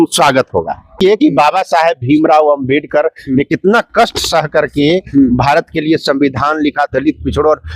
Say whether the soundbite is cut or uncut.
cut